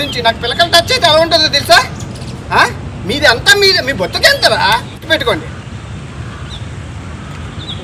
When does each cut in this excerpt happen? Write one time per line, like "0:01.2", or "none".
0:04.9